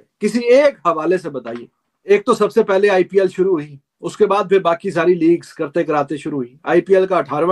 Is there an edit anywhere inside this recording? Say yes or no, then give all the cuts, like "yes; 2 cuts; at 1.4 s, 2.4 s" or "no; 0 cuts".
yes; 1 cut; at 2.1 s